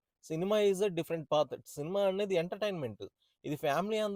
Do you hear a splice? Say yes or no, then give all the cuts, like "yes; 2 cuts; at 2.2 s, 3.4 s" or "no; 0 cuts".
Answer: no; 0 cuts